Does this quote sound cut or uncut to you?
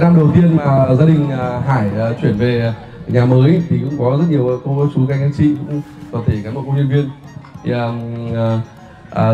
uncut